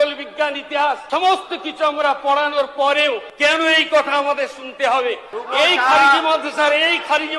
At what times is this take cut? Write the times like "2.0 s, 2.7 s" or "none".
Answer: 1.0 s, 3.3 s, 5.3 s

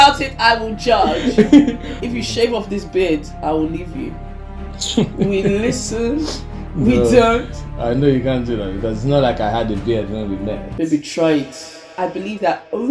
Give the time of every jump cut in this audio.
2.0 s, 11.9 s

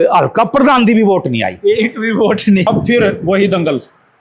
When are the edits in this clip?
2.7 s

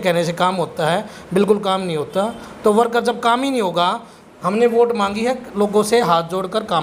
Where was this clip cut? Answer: none

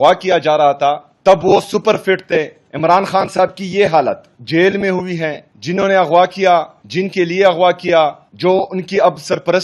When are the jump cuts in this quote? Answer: 1.1 s, 2.6 s, 4.3 s, 5.5 s, 6.8 s, 8.3 s

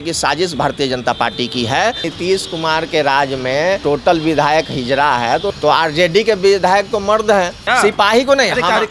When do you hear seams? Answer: 2.1 s, 3.8 s, 5.5 s, 7.6 s

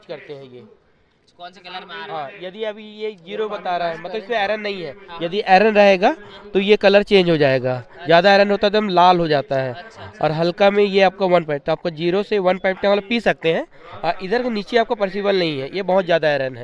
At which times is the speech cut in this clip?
none

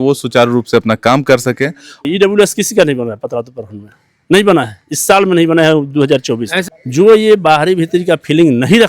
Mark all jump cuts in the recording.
2.0 s, 6.6 s

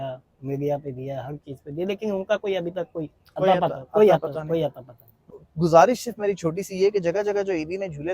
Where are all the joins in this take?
5.3 s

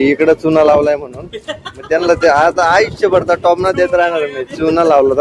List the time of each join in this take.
none

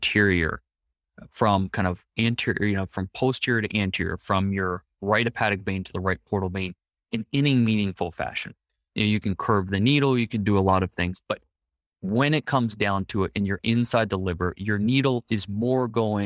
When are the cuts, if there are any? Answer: none

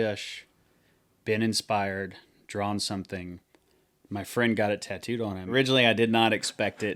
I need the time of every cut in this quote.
5.5 s

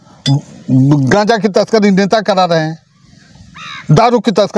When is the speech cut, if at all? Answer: none

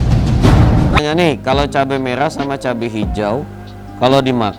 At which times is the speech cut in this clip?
1.0 s

